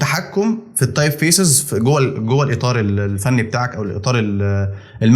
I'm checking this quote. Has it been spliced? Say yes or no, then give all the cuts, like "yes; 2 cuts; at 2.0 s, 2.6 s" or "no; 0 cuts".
no; 0 cuts